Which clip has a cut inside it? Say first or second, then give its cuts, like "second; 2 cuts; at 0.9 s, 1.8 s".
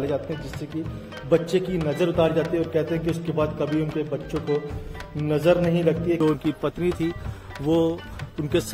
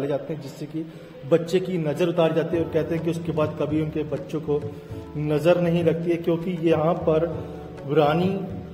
first; 1 cut; at 6.2 s